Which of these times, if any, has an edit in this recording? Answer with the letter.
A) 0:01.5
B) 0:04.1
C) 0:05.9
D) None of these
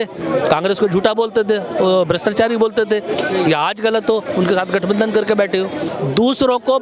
C